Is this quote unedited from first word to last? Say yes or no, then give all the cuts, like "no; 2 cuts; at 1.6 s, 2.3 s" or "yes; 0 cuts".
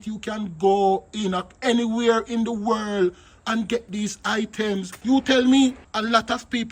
no; 2 cuts; at 4.9 s, 5.9 s